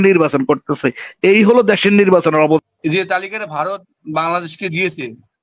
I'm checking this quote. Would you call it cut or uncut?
cut